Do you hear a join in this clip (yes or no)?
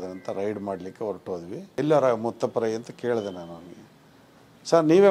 yes